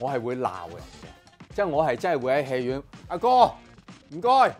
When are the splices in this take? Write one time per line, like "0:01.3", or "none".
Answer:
none